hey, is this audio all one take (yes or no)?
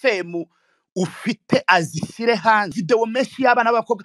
no